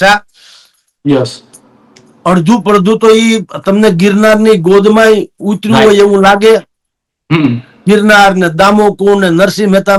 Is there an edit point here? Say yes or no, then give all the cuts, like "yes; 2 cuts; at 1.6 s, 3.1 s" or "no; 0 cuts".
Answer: no; 0 cuts